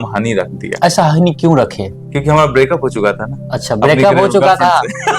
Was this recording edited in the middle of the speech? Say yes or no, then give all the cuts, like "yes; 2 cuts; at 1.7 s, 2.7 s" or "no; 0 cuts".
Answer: no; 0 cuts